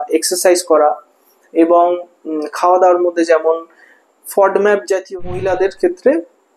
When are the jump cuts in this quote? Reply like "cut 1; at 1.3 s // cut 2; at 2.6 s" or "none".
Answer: cut 1; at 5.0 s